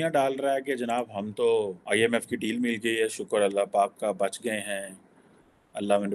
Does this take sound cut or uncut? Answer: cut